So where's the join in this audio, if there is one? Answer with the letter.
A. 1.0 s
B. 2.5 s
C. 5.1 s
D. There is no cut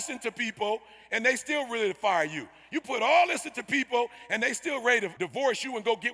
C